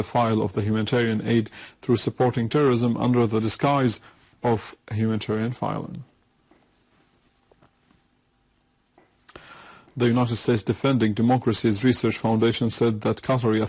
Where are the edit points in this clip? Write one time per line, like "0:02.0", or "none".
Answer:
0:11.2